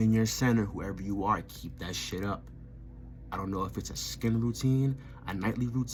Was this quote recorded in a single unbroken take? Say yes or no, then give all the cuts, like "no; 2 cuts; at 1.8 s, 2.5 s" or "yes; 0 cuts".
yes; 0 cuts